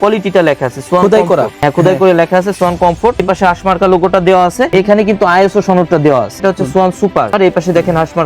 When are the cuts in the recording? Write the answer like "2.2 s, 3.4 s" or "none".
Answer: 1.5 s, 3.2 s, 4.7 s, 6.4 s, 7.3 s